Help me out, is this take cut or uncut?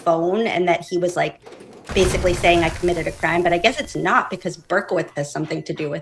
uncut